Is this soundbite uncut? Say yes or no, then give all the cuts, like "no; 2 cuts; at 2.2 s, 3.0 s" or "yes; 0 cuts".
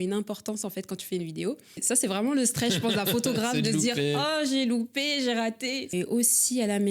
no; 2 cuts; at 1.8 s, 5.9 s